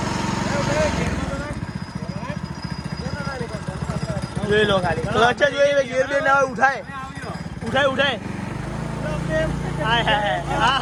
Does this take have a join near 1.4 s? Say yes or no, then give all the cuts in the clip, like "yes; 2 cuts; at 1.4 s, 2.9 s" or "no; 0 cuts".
no; 0 cuts